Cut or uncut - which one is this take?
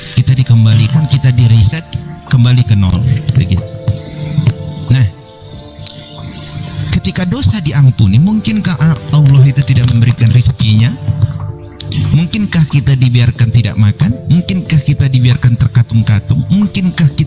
uncut